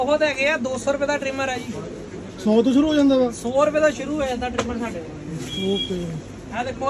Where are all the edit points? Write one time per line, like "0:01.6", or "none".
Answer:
none